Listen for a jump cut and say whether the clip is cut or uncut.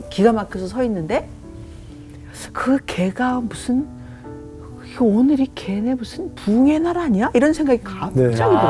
uncut